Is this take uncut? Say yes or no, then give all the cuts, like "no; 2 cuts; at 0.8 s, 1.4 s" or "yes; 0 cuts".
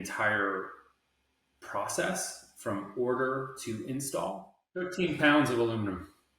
no; 1 cut; at 4.9 s